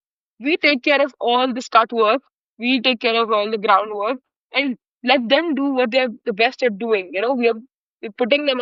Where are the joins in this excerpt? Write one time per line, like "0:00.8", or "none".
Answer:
none